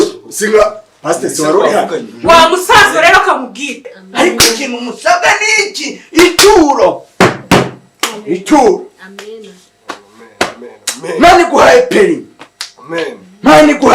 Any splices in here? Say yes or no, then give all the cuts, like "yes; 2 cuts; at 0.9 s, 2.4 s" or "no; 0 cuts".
yes; 1 cut; at 3.9 s